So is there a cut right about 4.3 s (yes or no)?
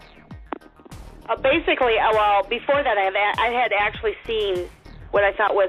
no